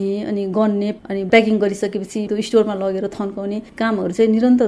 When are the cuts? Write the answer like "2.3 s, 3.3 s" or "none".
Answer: 0.9 s, 2.3 s